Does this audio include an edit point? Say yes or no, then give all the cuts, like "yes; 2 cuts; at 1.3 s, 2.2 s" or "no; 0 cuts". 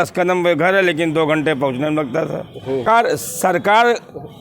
yes; 1 cut; at 2.8 s